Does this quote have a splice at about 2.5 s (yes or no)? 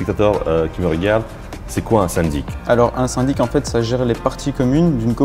yes